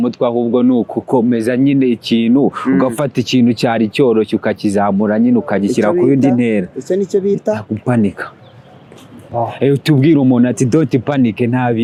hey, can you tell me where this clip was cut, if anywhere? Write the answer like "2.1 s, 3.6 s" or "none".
none